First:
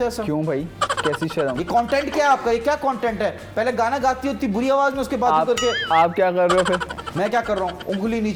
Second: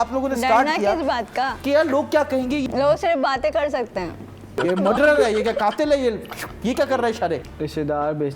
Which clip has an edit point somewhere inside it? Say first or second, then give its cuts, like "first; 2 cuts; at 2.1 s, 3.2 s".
second; 4 cuts; at 1.6 s, 2.7 s, 4.6 s, 7.5 s